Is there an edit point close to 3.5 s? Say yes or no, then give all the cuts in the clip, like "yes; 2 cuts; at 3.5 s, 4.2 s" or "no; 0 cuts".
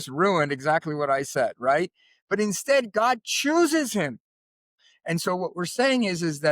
no; 1 cut; at 4.8 s